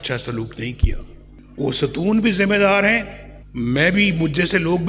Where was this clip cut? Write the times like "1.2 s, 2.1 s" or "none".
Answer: none